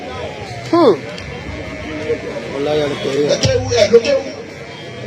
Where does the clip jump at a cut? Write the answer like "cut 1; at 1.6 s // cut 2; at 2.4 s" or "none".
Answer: none